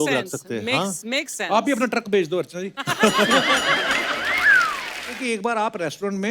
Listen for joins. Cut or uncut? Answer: cut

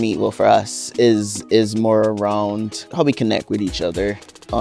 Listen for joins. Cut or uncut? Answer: cut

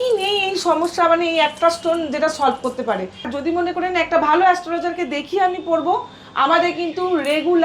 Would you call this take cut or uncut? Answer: cut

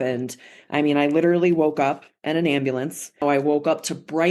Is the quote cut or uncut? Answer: cut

